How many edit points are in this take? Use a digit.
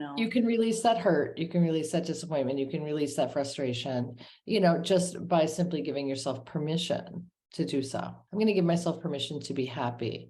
1